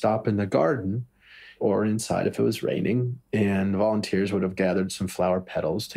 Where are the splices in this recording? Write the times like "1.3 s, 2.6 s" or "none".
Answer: none